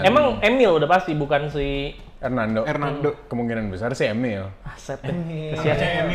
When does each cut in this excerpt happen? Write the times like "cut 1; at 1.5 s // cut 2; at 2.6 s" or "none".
none